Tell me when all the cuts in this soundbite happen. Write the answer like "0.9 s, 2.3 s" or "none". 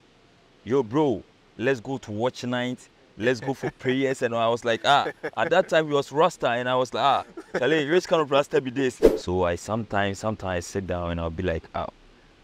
9.1 s